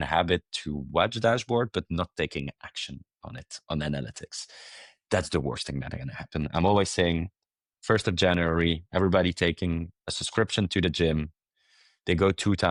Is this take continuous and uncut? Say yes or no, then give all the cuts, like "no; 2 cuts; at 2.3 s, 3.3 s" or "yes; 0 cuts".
yes; 0 cuts